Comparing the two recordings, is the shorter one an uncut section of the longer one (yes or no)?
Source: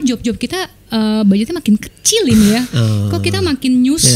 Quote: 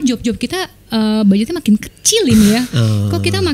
yes